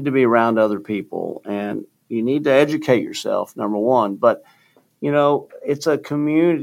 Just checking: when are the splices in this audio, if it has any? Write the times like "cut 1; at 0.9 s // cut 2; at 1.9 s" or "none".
none